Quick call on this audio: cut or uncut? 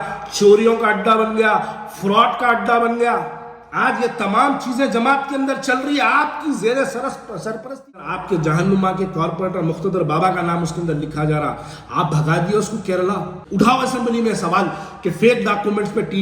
cut